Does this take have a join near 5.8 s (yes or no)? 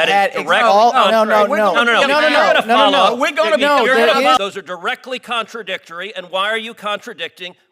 no